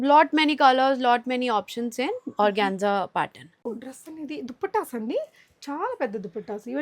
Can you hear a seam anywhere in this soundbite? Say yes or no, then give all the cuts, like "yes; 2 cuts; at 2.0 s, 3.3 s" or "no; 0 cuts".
yes; 1 cut; at 3.6 s